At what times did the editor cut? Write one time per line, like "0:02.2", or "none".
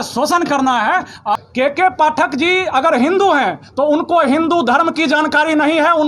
0:01.3